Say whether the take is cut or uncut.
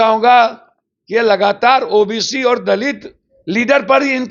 uncut